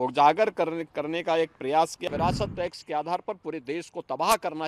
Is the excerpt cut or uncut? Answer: cut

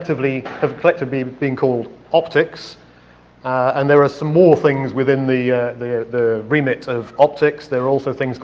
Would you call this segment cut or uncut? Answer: cut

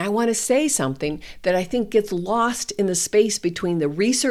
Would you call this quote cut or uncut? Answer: uncut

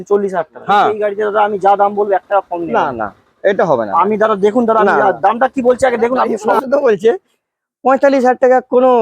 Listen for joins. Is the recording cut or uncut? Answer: cut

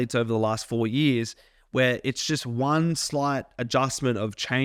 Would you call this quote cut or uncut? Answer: uncut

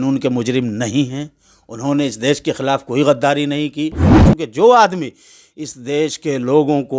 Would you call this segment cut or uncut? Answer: cut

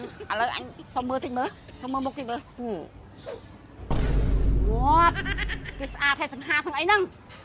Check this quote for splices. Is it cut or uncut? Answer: uncut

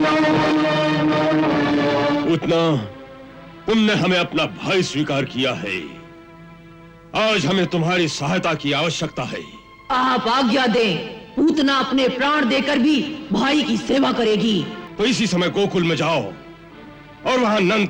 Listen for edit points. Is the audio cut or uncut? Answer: cut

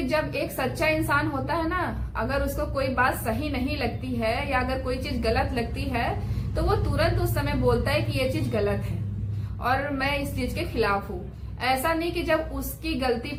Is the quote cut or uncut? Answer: uncut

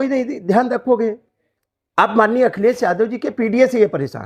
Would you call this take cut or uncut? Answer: uncut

